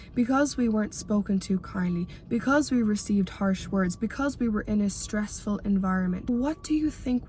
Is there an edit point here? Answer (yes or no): yes